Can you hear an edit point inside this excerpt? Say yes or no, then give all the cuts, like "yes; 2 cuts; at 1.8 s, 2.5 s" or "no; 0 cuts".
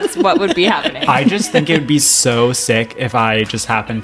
yes; 1 cut; at 0.9 s